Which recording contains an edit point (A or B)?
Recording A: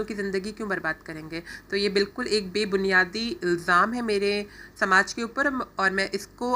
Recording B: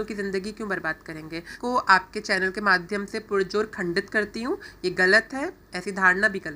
B